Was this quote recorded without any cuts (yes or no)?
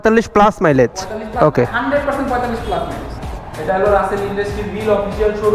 no